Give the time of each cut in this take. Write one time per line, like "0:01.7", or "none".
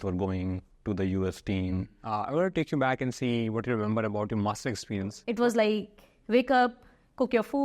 0:01.9
0:05.1